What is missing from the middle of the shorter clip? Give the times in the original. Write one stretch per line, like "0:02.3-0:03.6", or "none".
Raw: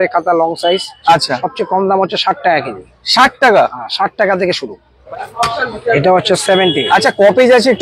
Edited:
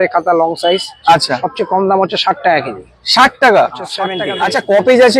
0:04.2-0:06.7